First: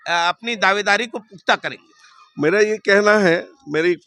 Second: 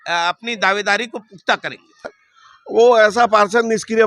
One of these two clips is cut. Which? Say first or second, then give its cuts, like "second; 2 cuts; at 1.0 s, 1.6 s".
second; 1 cut; at 2.2 s